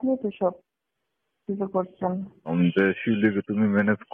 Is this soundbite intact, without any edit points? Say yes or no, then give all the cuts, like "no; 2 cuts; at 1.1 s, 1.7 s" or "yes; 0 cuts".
no; 1 cut; at 2.5 s